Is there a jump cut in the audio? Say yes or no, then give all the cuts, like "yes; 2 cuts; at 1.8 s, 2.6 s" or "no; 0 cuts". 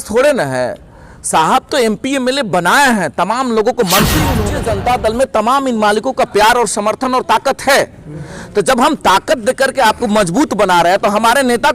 yes; 1 cut; at 4.4 s